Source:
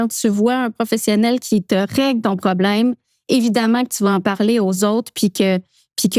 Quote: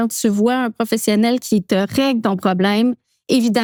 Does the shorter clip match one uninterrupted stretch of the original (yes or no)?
yes